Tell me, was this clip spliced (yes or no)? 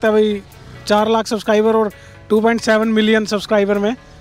no